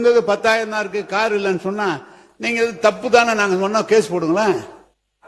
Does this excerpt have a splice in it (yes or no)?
no